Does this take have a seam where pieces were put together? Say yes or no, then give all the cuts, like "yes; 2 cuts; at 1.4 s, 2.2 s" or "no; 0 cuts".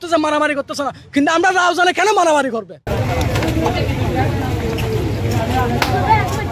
no; 0 cuts